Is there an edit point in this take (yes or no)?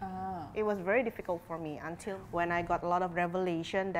yes